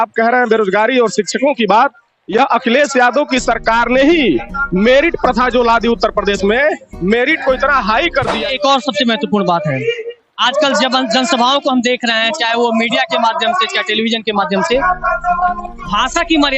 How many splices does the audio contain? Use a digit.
1